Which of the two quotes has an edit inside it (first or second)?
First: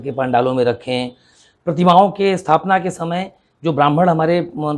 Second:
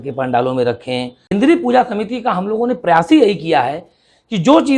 second